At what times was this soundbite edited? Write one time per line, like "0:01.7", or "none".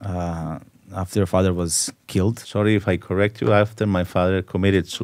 0:02.4